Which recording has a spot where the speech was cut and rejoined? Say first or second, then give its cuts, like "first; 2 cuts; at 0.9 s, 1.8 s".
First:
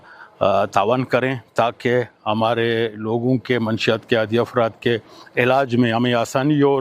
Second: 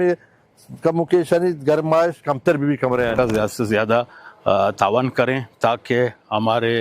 second; 1 cut; at 3.1 s